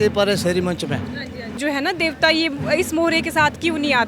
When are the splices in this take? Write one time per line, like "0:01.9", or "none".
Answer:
0:01.6